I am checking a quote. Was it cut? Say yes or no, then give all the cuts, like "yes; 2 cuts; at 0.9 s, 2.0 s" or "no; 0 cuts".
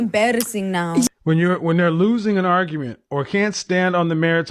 yes; 1 cut; at 1.1 s